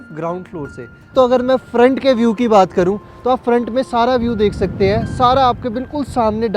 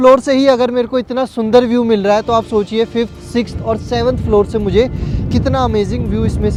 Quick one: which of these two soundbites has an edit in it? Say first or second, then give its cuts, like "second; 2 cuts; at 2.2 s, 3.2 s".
first; 1 cut; at 1.1 s